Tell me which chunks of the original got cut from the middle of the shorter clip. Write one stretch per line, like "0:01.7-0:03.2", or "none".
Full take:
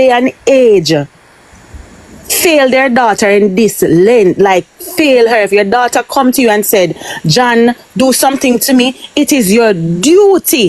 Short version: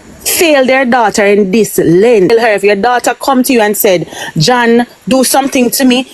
0:04.3-0:05.2